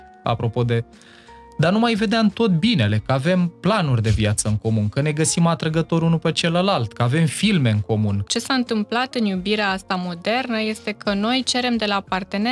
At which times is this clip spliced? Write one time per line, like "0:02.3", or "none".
0:08.3